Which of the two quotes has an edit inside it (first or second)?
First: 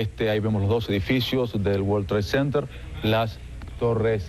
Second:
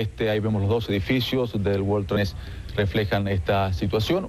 first